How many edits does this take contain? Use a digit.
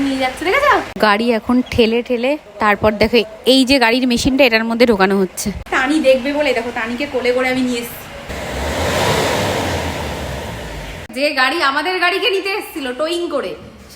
5